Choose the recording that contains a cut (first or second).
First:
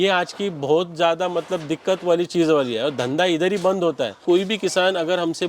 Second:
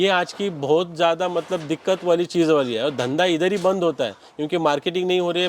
first